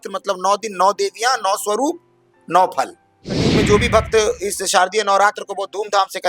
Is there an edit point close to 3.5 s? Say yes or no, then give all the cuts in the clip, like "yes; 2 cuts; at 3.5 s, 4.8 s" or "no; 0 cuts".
yes; 1 cut; at 3.5 s